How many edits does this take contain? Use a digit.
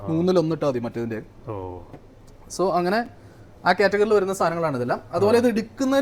0